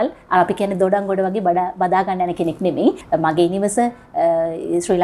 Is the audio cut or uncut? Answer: cut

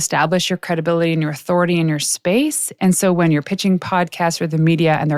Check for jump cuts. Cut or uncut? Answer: uncut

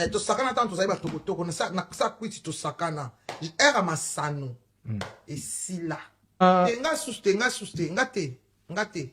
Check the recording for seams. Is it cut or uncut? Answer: cut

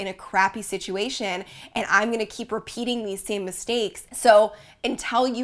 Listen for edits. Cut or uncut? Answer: cut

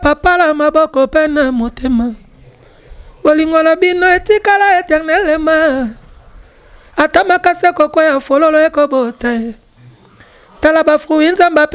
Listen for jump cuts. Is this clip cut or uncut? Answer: uncut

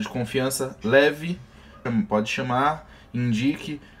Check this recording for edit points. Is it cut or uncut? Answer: cut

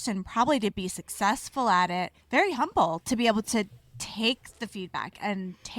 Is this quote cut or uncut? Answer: cut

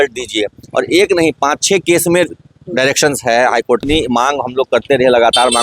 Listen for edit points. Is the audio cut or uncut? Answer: cut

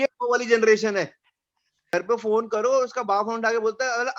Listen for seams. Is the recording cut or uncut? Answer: cut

